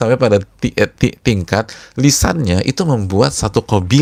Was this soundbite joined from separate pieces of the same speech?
no; 0 cuts

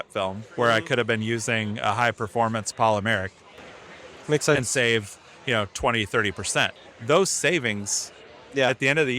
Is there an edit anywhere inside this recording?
yes; 1 cut; at 6.8 s

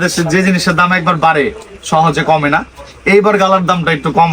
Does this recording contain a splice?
no; 0 cuts

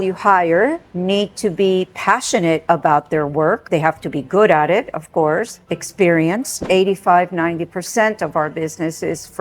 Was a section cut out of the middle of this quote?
yes; 1 cut; at 6.6 s

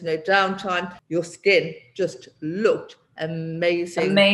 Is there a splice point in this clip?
no; 0 cuts

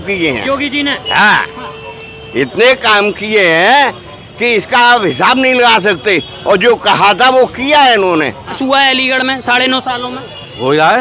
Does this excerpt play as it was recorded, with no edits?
no; 1 cut; at 8.6 s

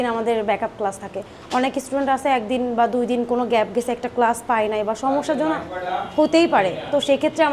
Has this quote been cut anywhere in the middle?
no; 0 cuts

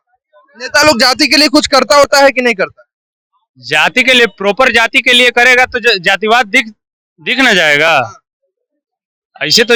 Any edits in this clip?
no; 0 cuts

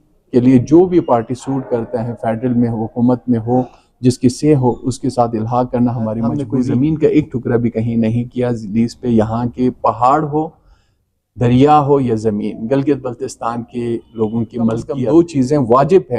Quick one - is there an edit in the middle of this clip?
yes; 2 cuts; at 6.4 s, 14.9 s

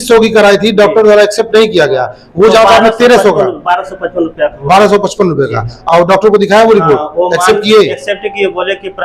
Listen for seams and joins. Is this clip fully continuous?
yes; 0 cuts

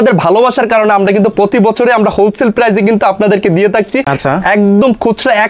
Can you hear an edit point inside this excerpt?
no; 0 cuts

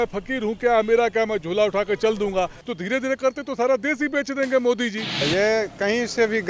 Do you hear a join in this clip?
yes; 2 cuts; at 2.6 s, 5.2 s

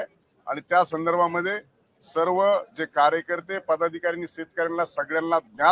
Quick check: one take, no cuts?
yes; 0 cuts

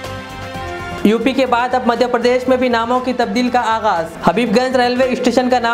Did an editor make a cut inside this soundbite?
no; 0 cuts

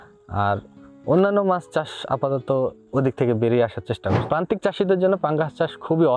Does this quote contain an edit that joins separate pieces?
yes; 1 cut; at 4.2 s

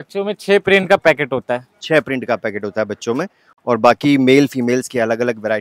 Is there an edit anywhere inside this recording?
no; 0 cuts

